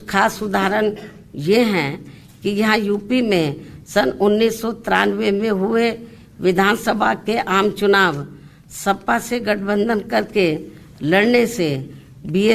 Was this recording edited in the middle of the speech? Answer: no; 0 cuts

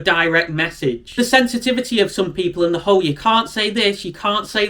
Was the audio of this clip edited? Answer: yes; 1 cut; at 1.1 s

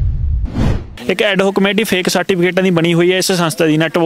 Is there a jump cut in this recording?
yes; 1 cut; at 0.9 s

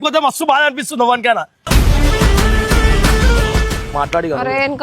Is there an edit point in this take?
yes; 1 cut; at 3.9 s

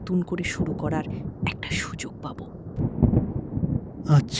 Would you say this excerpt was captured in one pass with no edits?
no; 1 cut; at 2.8 s

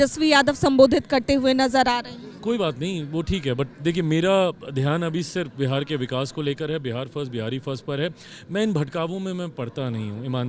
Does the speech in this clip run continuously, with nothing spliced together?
yes; 0 cuts

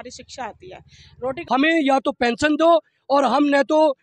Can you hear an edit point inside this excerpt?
yes; 1 cut; at 1.4 s

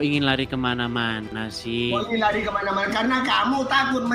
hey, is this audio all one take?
yes; 0 cuts

